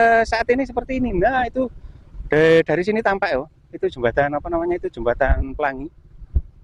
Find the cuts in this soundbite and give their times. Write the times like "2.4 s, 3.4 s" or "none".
none